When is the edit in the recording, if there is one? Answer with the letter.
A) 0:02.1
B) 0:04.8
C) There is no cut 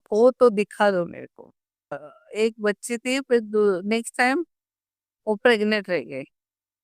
A